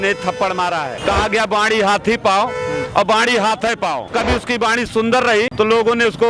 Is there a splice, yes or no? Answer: yes